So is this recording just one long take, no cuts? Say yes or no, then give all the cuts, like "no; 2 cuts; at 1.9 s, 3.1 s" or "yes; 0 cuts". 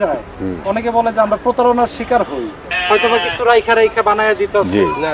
no; 1 cut; at 2.7 s